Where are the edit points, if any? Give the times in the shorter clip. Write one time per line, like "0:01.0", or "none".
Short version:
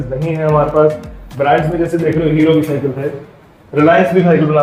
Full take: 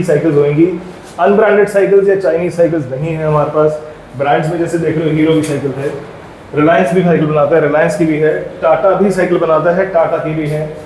none